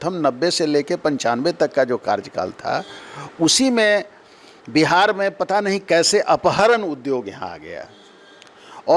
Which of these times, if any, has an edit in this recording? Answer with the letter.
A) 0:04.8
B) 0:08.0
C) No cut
C